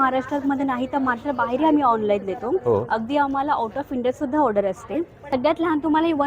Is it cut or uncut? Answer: cut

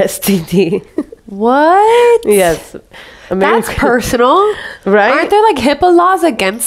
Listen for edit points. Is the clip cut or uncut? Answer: uncut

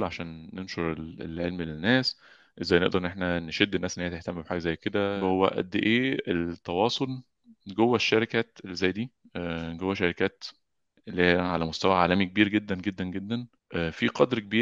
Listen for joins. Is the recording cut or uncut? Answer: cut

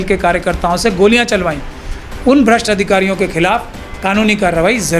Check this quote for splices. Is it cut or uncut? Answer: uncut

